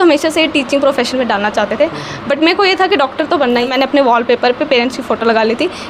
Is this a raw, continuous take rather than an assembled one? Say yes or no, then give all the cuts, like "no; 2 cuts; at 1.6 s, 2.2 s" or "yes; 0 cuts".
no; 1 cut; at 3.7 s